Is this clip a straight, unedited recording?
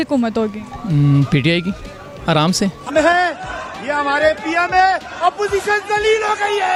yes; 0 cuts

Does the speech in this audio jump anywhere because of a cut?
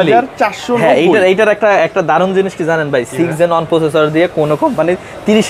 no; 0 cuts

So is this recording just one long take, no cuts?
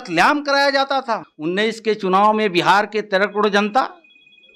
no; 1 cut; at 1.3 s

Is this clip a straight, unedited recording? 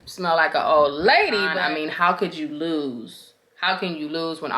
no; 1 cut; at 1.6 s

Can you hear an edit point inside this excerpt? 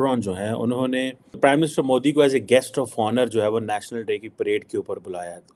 yes; 1 cut; at 1.4 s

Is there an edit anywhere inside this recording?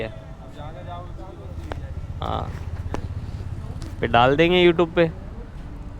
no; 0 cuts

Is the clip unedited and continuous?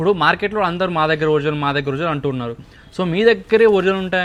yes; 0 cuts

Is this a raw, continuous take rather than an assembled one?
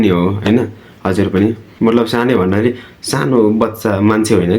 no; 1 cut; at 1.7 s

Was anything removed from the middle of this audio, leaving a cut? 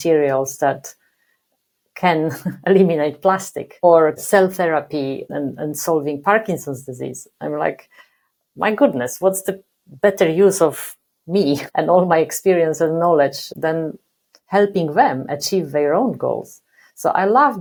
no; 0 cuts

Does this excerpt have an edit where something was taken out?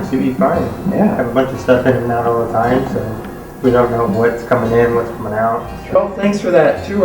yes; 1 cut; at 6.0 s

